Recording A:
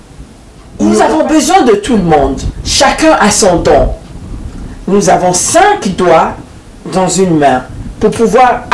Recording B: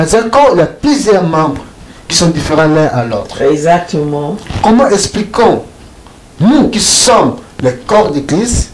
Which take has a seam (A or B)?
A